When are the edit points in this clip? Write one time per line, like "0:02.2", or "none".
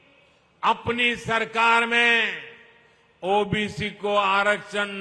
none